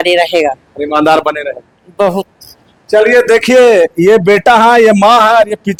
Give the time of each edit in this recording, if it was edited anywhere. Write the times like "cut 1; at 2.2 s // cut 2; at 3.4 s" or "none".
none